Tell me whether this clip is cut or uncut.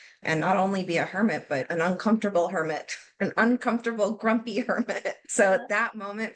cut